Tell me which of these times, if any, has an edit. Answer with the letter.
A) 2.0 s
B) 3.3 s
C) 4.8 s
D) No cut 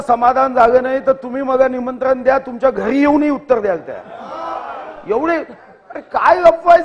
D